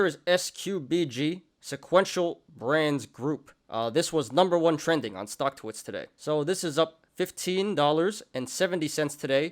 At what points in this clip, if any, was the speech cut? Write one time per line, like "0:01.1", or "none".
none

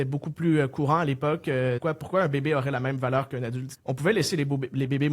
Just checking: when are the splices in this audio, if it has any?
0:01.8
0:03.7

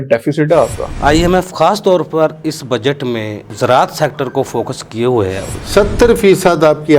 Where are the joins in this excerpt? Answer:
0:00.9
0:05.6

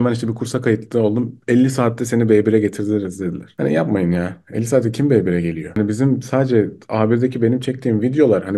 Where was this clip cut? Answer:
0:05.7

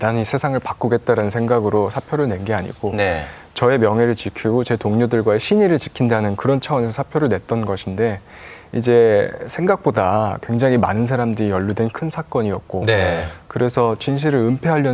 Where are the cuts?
none

